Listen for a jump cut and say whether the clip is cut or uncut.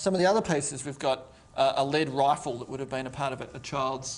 uncut